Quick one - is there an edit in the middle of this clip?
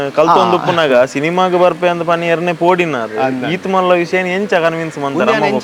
no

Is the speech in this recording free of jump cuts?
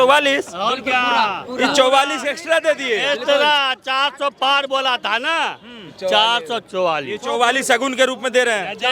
yes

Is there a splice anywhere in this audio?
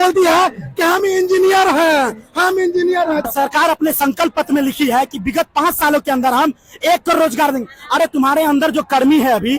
yes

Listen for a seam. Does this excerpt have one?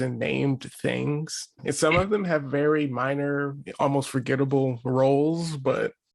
yes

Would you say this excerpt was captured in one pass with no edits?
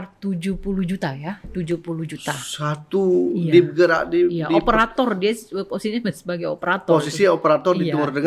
yes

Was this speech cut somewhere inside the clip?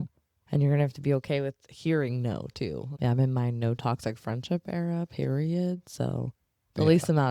yes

